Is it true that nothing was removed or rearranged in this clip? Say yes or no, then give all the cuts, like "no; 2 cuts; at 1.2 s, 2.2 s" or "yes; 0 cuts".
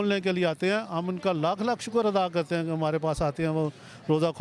yes; 0 cuts